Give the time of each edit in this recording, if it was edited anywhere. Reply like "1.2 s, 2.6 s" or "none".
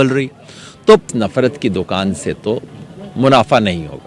1.1 s